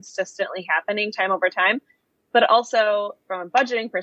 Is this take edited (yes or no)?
no